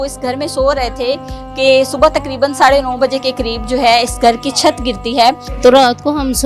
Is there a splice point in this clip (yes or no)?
yes